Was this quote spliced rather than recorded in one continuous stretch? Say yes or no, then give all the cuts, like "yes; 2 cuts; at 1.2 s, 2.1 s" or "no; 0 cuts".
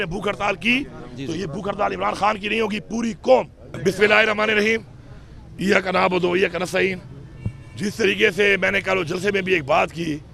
yes; 1 cut; at 3.6 s